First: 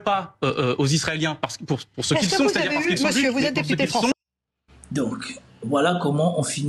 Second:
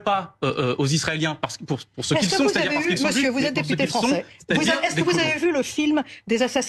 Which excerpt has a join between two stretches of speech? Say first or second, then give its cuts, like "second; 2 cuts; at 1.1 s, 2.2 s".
second; 1 cut; at 4.1 s